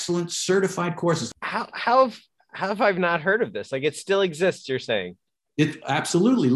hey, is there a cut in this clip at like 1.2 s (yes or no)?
yes